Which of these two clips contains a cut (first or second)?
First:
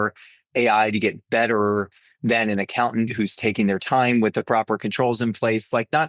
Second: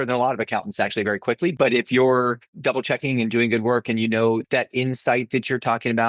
second